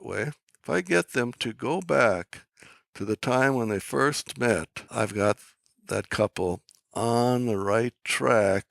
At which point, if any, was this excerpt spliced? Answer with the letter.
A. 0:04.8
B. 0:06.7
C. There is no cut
A